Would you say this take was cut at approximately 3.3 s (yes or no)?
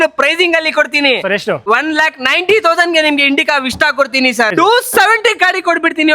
no